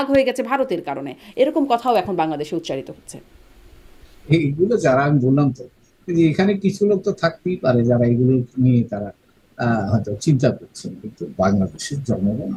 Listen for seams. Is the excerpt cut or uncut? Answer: uncut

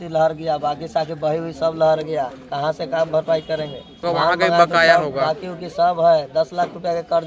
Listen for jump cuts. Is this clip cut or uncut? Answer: cut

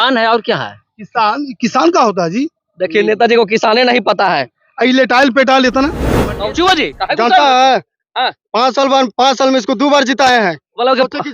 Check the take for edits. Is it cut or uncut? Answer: cut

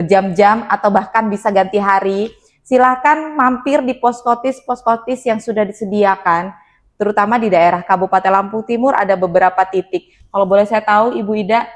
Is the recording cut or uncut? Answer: uncut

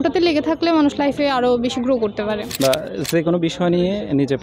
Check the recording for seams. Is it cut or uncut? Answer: cut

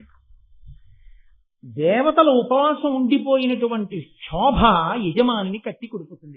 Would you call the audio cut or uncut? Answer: uncut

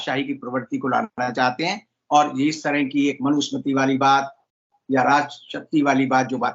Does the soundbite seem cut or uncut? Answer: uncut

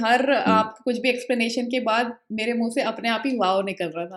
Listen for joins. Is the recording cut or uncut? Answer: uncut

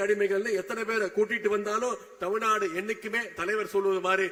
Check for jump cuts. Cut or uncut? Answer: uncut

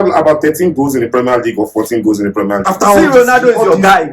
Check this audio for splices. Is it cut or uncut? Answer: cut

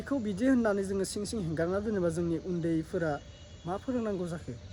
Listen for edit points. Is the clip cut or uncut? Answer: uncut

